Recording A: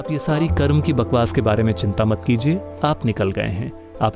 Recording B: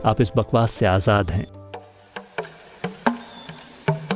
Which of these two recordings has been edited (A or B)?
B